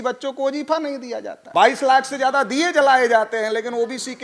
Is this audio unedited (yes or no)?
no